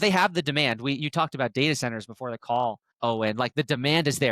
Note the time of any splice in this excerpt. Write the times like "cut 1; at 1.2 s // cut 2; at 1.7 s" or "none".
cut 1; at 2.9 s